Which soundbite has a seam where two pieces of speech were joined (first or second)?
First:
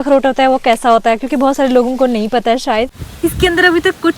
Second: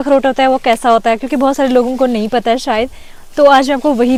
first